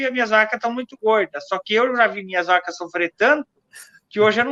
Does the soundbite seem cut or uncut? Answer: uncut